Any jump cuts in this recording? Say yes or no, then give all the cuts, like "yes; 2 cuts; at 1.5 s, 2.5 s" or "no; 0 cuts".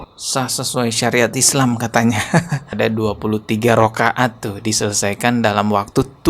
yes; 1 cut; at 2.7 s